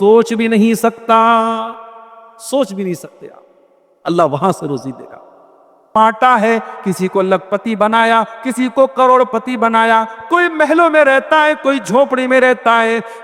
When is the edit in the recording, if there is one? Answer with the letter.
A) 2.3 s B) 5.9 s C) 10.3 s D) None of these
B